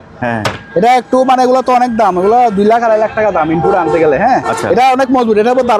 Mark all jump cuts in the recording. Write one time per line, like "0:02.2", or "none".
none